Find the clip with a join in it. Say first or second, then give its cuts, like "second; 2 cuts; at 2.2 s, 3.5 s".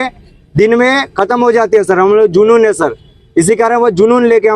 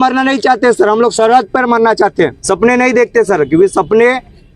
second; 1 cut; at 2.4 s